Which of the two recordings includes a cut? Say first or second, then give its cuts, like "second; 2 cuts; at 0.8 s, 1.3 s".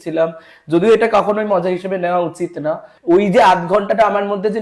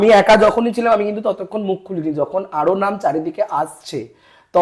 first; 1 cut; at 2.9 s